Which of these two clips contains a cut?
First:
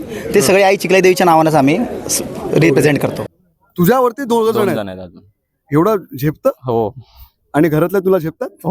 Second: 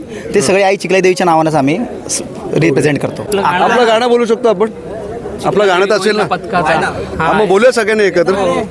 first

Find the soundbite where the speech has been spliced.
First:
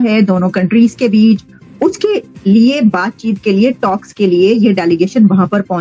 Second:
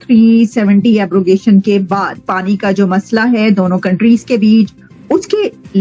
second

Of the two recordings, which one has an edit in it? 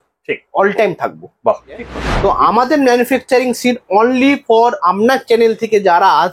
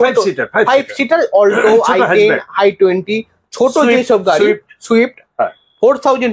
first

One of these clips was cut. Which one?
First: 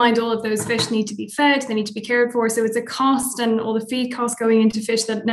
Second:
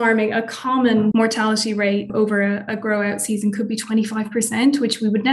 second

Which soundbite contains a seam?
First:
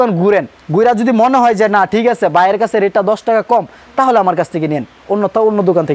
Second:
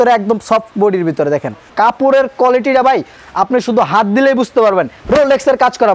second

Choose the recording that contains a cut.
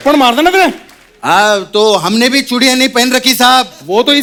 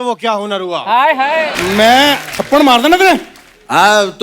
second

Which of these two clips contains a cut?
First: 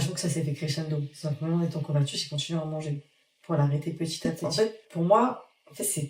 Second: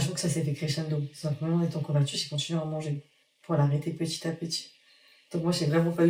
first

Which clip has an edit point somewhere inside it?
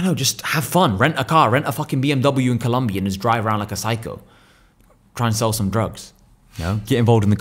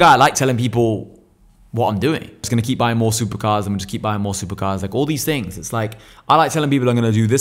second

